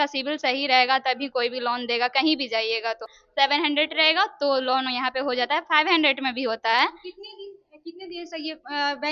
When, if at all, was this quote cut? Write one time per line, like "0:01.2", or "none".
0:03.2

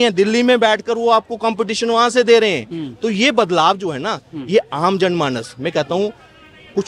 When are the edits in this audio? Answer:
none

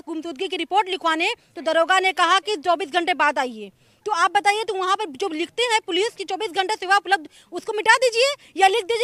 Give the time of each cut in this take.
none

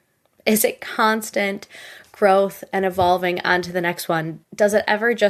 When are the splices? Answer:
none

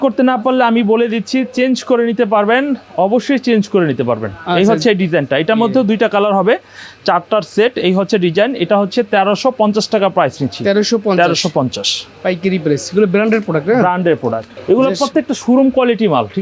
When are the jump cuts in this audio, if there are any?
none

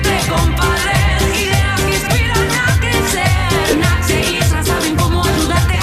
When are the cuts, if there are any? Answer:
none

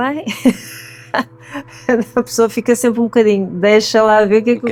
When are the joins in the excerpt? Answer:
none

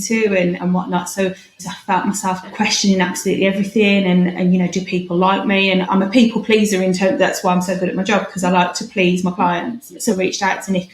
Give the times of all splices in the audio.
0:01.7
0:10.0

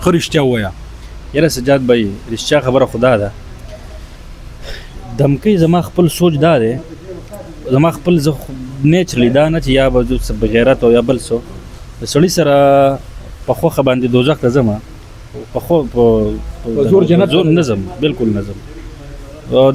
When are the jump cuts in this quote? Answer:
none

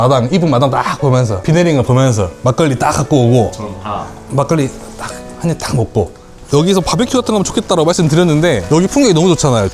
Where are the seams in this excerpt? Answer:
0:01.4
0:02.3
0:04.2
0:06.4
0:08.6

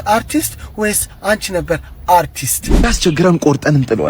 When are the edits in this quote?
0:02.9

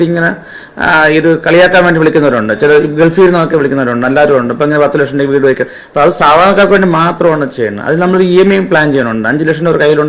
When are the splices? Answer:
none

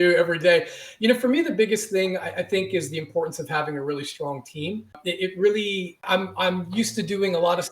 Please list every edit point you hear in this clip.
0:05.0
0:06.0

